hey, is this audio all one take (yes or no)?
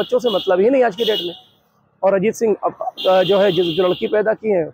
yes